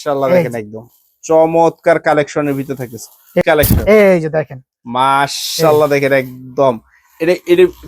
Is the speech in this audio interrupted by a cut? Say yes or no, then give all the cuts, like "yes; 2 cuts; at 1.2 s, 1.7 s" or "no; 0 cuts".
yes; 1 cut; at 3.4 s